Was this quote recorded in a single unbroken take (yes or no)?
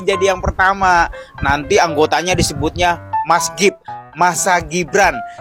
yes